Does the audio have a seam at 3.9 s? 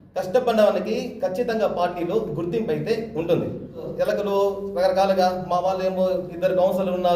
yes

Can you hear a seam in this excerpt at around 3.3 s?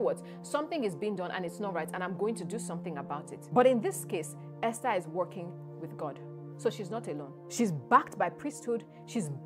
yes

